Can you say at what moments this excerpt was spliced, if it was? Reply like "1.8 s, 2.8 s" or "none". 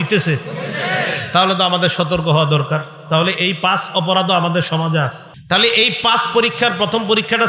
5.3 s